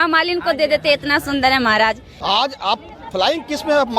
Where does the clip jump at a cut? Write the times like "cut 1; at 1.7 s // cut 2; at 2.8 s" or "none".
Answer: cut 1; at 2.1 s